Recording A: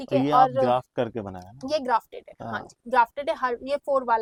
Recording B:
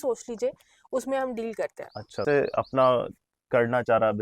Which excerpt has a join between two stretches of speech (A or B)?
B